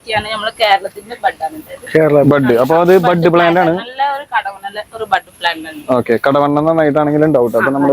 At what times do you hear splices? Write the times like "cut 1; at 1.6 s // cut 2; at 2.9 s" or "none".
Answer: none